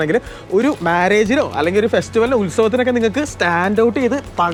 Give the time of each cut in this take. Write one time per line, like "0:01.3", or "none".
none

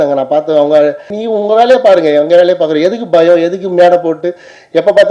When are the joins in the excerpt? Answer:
0:01.1

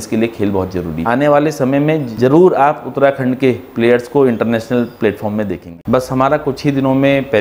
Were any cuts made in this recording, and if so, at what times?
0:01.0
0:02.1
0:05.7

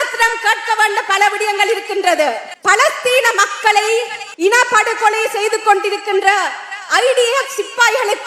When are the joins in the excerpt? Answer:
0:02.5
0:04.2

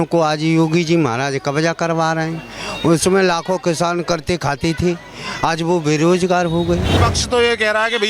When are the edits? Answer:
0:07.0

